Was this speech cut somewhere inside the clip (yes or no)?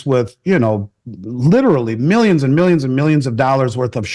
no